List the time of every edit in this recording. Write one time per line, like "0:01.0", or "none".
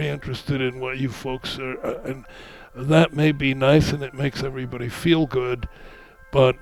none